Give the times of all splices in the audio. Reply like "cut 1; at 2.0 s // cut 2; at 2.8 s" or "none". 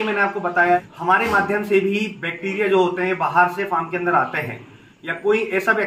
cut 1; at 0.9 s

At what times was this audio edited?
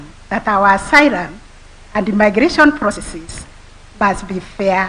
cut 1; at 2.9 s

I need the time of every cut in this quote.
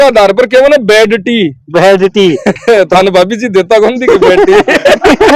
none

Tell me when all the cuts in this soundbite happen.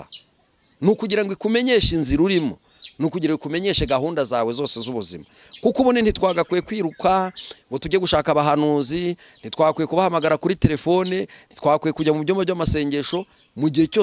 none

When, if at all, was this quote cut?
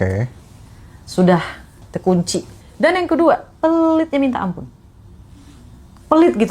cut 1; at 2.6 s

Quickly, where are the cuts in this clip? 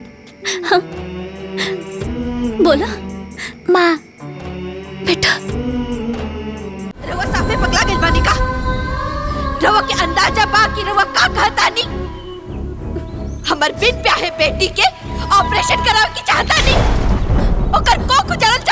cut 1; at 7.1 s

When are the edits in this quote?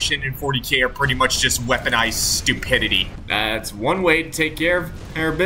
cut 1; at 3.2 s

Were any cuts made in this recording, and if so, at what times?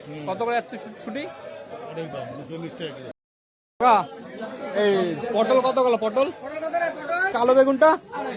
cut 1; at 3.1 s // cut 2; at 7.3 s

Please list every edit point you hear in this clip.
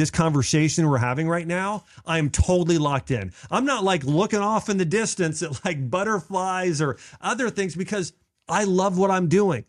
none

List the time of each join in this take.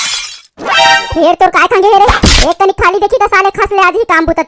none

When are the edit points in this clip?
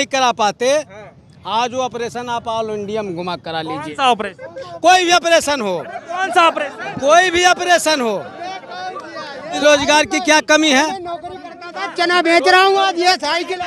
none

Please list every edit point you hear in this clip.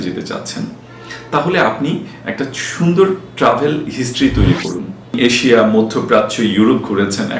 cut 1; at 5.0 s

